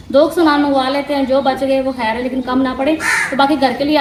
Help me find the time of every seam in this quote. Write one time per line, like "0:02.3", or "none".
none